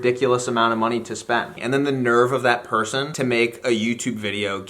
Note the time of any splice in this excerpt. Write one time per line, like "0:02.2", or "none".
0:01.5
0:03.1